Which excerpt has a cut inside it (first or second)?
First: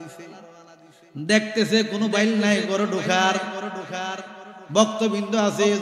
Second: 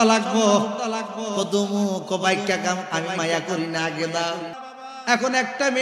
second